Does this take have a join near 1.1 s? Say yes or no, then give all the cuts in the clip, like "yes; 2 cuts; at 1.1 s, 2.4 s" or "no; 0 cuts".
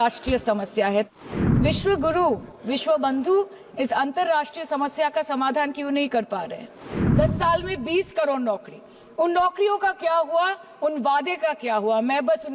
yes; 2 cuts; at 1.1 s, 7.0 s